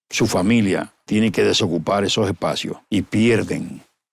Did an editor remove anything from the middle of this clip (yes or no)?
yes